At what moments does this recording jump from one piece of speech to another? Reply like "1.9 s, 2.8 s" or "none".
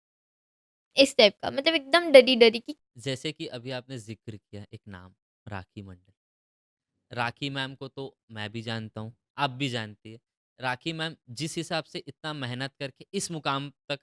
2.7 s